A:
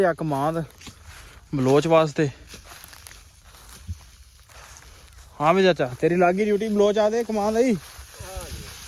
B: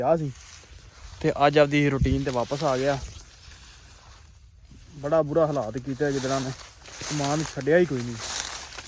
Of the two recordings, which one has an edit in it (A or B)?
B